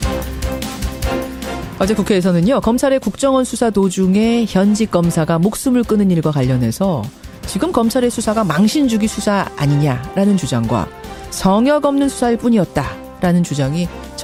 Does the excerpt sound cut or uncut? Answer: uncut